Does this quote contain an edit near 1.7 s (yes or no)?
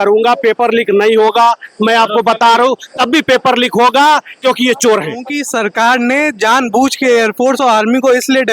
no